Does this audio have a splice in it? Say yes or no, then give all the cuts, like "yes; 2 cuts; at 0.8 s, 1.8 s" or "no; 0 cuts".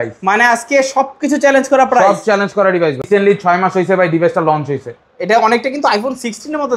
yes; 1 cut; at 3.1 s